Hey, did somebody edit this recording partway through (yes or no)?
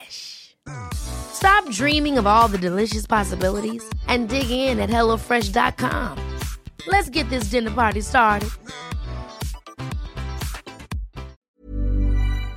yes